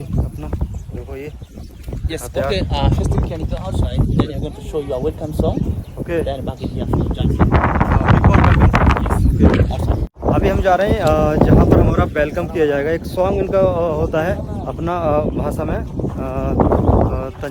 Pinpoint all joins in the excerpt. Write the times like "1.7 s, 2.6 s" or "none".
none